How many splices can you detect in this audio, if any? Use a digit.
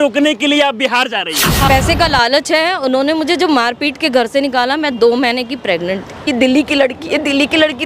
2